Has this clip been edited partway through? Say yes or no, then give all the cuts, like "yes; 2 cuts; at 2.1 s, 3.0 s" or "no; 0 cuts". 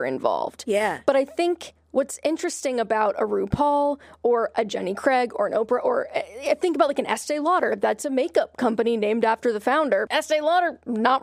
yes; 1 cut; at 10.1 s